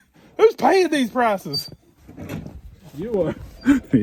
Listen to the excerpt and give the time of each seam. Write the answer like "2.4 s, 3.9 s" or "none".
none

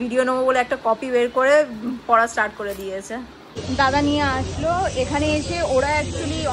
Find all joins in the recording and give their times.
3.6 s

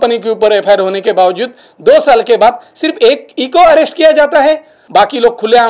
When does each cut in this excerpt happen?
4.8 s

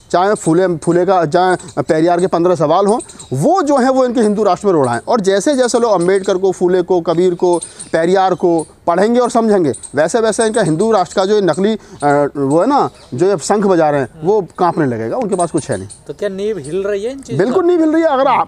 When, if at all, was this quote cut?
none

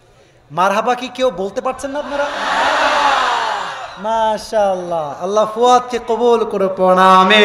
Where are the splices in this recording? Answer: none

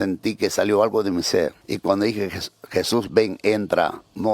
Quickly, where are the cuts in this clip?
1.6 s

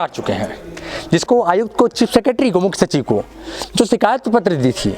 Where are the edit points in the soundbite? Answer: 1.2 s

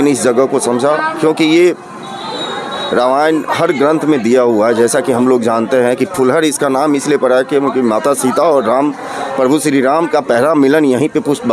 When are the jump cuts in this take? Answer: none

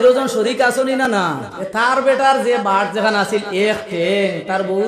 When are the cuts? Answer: 1.1 s

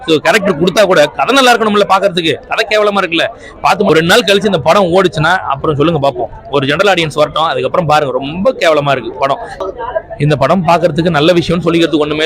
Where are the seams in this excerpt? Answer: 3.9 s, 9.5 s

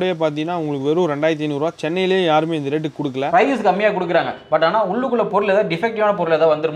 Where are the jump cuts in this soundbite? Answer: 3.3 s

